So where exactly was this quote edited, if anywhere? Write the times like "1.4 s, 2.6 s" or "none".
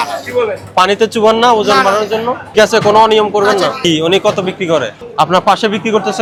none